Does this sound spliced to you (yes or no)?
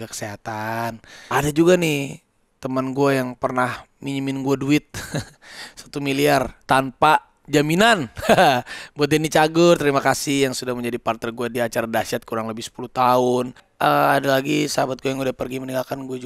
yes